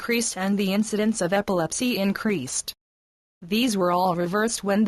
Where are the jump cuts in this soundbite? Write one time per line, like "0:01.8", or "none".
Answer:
0:02.7